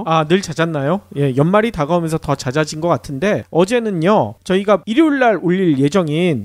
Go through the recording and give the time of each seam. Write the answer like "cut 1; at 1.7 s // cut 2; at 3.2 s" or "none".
none